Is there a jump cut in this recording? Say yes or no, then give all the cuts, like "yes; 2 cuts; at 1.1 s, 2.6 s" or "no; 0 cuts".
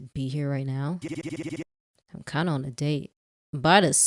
no; 0 cuts